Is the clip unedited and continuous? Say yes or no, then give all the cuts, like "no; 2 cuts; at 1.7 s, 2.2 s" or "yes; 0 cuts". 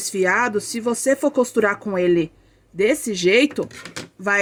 yes; 0 cuts